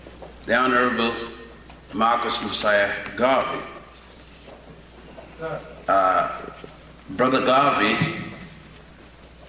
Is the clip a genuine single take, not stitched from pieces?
yes; 0 cuts

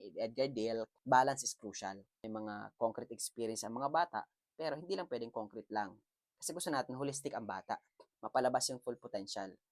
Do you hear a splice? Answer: yes; 2 cuts; at 0.9 s, 2.0 s

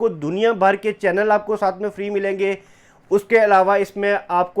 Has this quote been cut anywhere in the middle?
no; 0 cuts

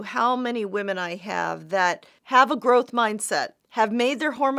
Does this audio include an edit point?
yes; 2 cuts; at 2.1 s, 3.6 s

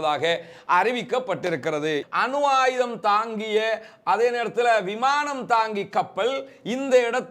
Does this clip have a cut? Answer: yes; 1 cut; at 2.0 s

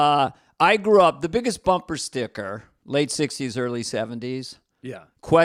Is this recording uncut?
yes; 0 cuts

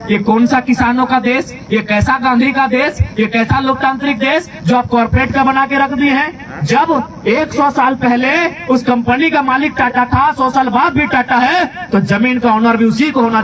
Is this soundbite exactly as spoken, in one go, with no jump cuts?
yes; 0 cuts

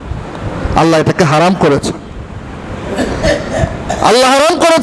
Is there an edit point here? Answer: no; 0 cuts

